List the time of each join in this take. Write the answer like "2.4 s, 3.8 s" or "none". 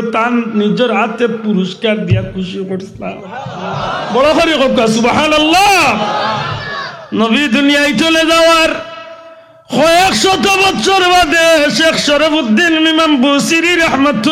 none